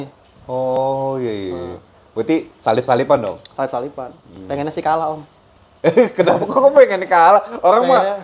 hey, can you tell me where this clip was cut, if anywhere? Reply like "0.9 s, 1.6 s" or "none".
none